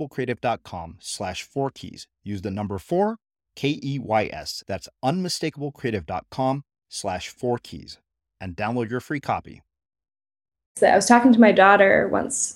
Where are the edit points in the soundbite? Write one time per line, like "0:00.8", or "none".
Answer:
0:10.7